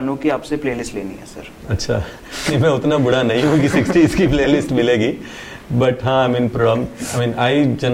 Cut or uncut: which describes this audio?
uncut